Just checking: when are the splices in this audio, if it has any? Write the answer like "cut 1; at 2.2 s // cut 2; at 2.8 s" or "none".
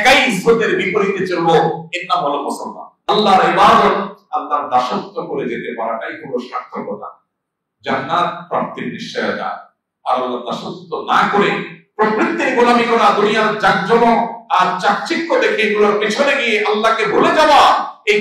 cut 1; at 2.9 s